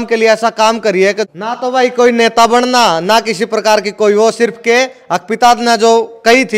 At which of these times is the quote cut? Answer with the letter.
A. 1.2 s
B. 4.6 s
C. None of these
A